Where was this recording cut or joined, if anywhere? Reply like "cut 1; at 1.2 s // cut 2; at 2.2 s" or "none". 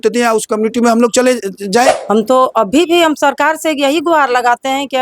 cut 1; at 1.9 s